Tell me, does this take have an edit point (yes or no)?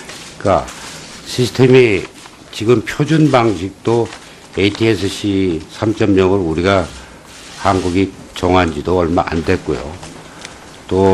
no